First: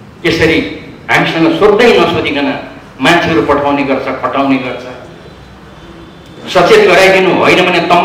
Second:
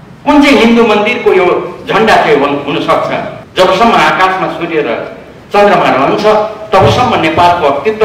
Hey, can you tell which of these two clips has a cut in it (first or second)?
second